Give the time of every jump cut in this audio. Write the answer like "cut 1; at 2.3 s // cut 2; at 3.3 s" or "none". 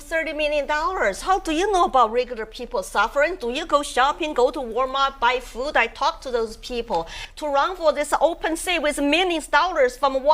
cut 1; at 7.2 s

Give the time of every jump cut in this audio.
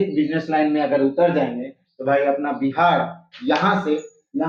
none

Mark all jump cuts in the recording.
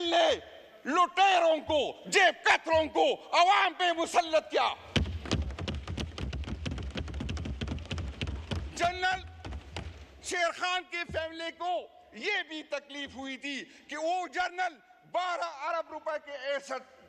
none

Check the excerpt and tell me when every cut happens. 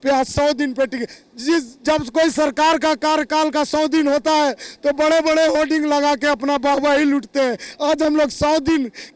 none

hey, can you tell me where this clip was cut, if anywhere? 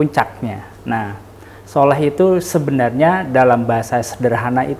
none

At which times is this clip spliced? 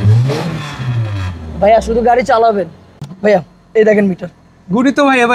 cut 1; at 3.1 s

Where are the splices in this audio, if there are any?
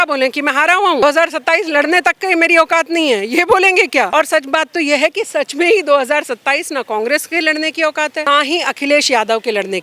cut 1; at 1.0 s // cut 2; at 4.1 s // cut 3; at 8.3 s

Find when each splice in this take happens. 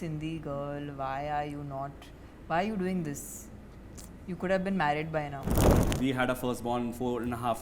cut 1; at 5.9 s

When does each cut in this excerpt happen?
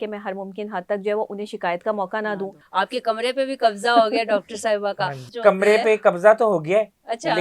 cut 1; at 2.6 s // cut 2; at 5.3 s

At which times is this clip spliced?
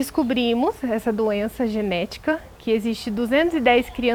none

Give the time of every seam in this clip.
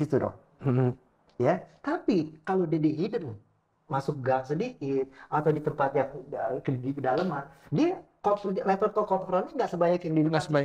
none

